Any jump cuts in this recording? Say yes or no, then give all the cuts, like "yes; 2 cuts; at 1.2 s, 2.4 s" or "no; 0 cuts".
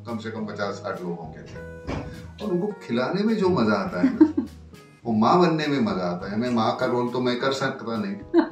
no; 0 cuts